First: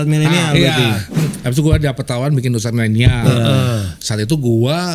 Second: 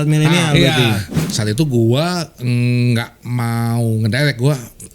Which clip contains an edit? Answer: second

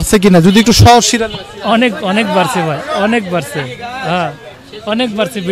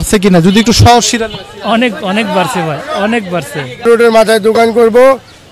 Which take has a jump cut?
second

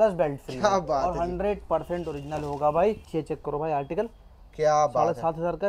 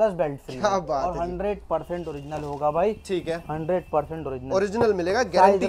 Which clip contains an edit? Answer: first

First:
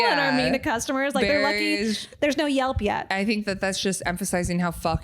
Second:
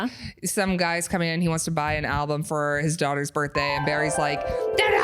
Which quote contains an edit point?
first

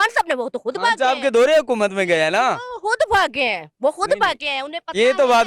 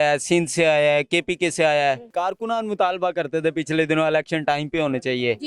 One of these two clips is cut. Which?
second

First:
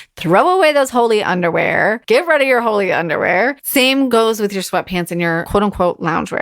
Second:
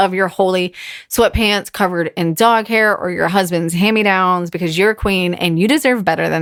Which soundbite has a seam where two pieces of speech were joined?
first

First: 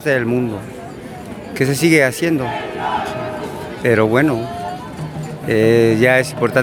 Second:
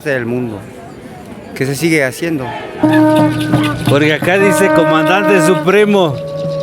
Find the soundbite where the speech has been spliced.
second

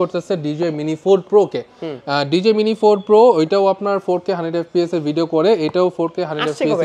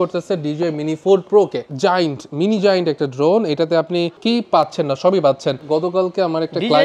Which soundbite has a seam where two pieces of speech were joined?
second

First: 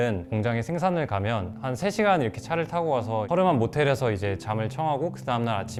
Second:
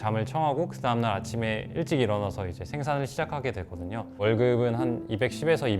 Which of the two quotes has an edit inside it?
second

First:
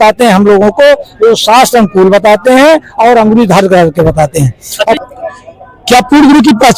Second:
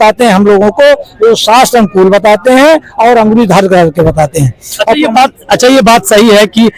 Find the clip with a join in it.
first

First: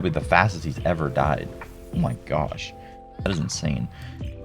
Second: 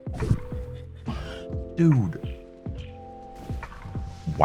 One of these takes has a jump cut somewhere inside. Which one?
first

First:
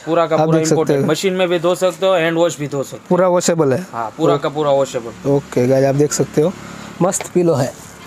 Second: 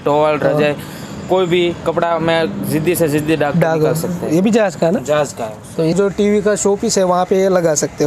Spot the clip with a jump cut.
second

